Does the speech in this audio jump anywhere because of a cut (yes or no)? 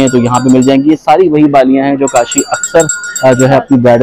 no